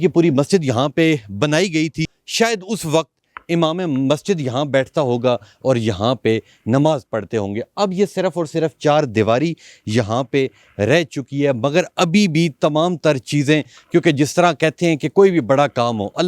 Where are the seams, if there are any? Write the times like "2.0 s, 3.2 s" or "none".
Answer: 2.2 s